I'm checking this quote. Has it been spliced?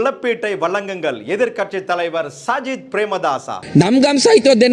yes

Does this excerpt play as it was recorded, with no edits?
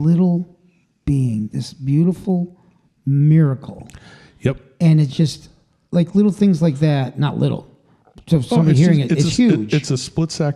yes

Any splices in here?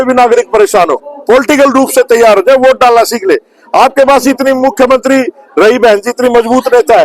yes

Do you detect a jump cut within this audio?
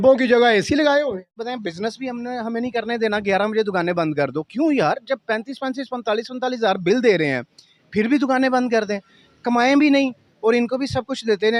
yes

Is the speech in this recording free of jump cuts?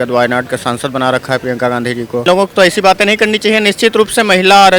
no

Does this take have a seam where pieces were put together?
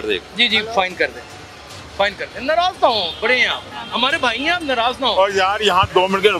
no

